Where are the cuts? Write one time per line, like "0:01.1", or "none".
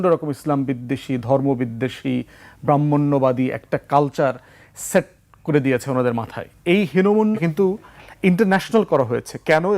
0:07.4